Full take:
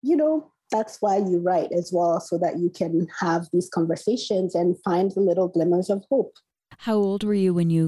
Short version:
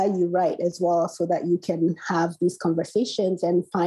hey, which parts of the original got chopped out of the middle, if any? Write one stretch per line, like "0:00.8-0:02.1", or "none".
none